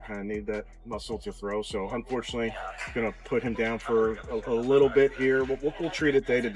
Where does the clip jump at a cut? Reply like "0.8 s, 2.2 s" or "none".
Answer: none

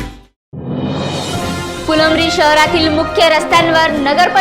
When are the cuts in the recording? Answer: none

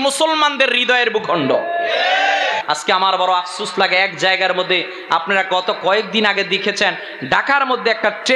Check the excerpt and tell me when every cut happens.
2.6 s

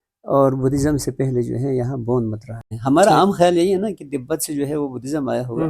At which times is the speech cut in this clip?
2.7 s

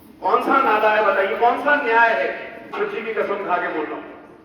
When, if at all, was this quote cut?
2.7 s

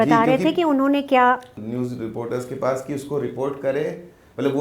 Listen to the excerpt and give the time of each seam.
1.5 s

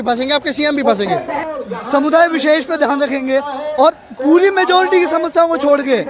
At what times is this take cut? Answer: 1.4 s

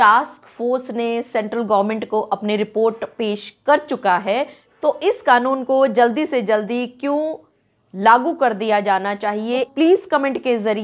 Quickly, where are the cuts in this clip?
4.6 s, 9.7 s

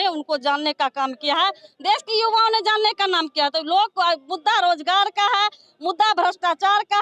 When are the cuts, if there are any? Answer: none

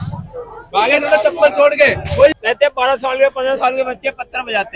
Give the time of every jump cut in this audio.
2.3 s

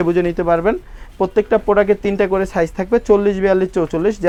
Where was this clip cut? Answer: none

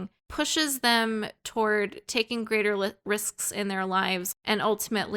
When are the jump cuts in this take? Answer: 4.3 s

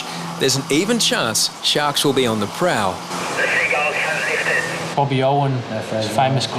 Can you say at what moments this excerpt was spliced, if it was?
3.1 s, 4.9 s

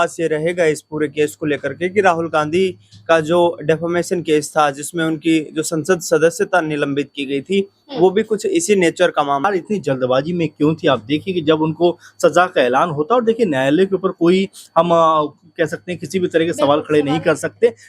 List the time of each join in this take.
9.4 s

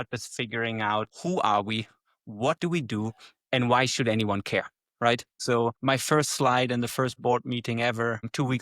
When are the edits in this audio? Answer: 1.1 s, 5.3 s

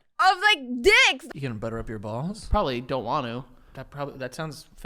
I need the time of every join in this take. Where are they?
1.2 s

